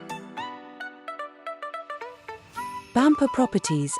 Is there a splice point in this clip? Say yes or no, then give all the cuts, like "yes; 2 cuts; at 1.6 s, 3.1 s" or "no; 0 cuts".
yes; 1 cut; at 2.9 s